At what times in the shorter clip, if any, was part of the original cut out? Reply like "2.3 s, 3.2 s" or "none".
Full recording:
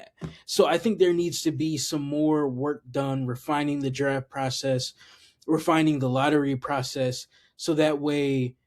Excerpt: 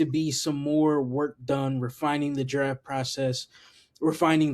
none